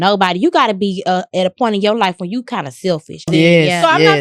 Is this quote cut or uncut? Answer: cut